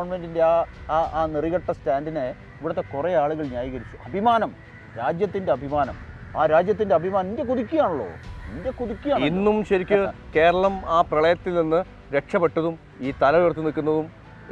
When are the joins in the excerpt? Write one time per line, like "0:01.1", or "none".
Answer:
none